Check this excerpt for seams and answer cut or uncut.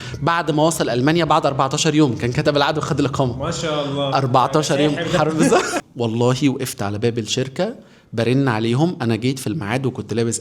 cut